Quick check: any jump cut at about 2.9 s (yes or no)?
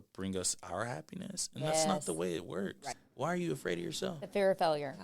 yes